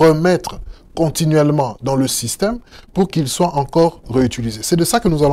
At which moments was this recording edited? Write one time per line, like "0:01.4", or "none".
none